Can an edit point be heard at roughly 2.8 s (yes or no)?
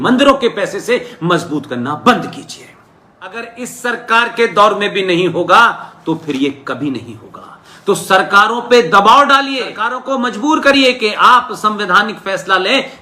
yes